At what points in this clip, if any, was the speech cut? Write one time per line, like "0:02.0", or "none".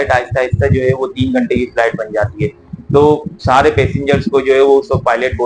none

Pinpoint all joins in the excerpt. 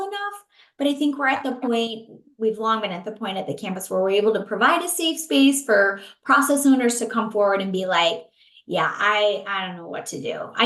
none

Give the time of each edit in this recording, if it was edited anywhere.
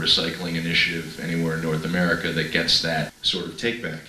0:03.2

